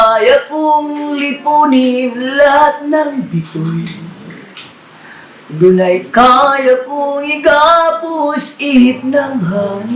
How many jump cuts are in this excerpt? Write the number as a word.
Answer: zero